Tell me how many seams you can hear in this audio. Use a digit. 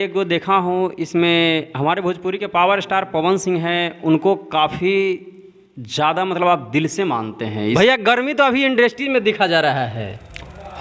1